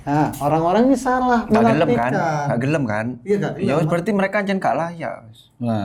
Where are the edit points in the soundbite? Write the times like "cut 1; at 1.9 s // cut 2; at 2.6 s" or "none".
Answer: none

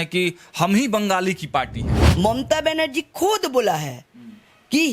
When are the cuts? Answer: cut 1; at 2.0 s

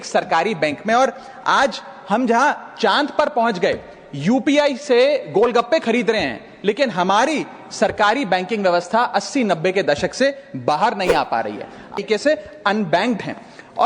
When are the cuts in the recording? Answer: cut 1; at 12.0 s

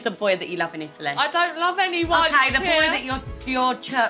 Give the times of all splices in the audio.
none

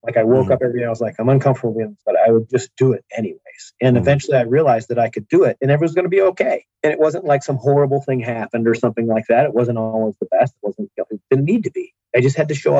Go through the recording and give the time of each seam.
cut 1; at 1.9 s // cut 2; at 6.7 s

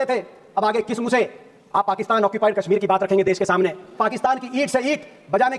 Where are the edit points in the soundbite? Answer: cut 1; at 3.9 s

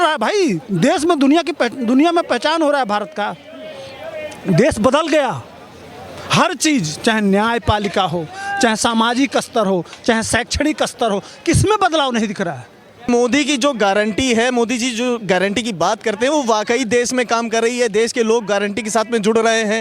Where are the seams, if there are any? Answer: cut 1; at 13.1 s

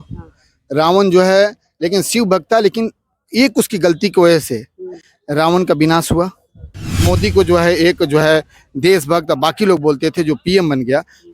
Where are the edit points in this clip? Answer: cut 1; at 7.0 s

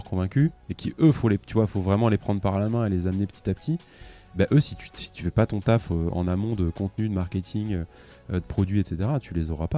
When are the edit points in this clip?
none

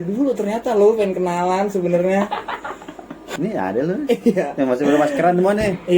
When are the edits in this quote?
cut 1; at 3.3 s

